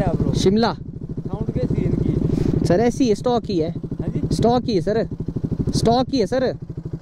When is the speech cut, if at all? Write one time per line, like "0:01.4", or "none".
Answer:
none